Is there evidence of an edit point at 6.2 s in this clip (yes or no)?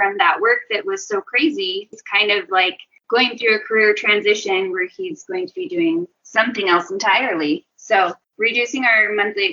no